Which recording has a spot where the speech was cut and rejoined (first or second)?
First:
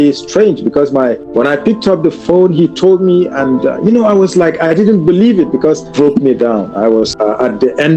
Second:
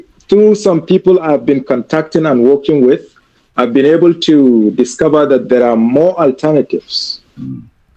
first